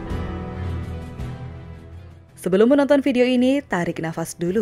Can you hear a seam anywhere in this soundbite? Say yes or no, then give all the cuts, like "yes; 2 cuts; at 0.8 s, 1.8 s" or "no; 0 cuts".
no; 0 cuts